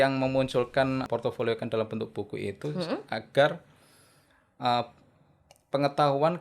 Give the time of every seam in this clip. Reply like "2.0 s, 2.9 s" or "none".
1.0 s